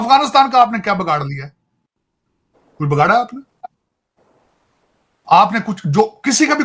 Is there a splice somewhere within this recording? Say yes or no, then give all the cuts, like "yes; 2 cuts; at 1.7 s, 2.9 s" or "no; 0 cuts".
no; 0 cuts